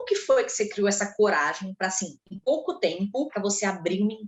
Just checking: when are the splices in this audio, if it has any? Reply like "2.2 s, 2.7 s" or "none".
3.3 s